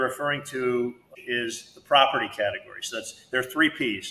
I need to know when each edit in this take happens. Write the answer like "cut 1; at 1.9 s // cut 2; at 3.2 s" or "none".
cut 1; at 1.1 s